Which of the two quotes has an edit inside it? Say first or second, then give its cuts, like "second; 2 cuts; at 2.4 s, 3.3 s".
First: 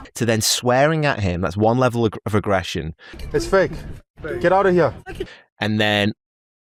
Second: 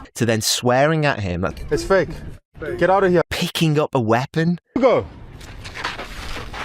second; 2 cuts; at 1.5 s, 3.2 s